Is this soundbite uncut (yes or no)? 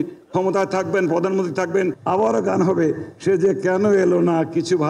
no